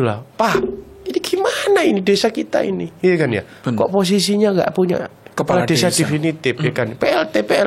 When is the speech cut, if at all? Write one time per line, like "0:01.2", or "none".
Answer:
none